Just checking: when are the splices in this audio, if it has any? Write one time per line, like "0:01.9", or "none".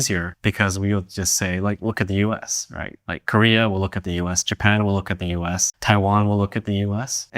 0:05.7